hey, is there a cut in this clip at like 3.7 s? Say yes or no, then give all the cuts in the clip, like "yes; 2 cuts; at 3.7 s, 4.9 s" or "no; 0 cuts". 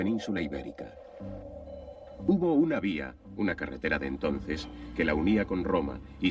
yes; 1 cut; at 3.7 s